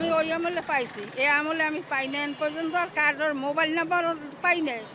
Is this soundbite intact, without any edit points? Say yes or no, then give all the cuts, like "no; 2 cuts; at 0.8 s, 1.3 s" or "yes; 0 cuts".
yes; 0 cuts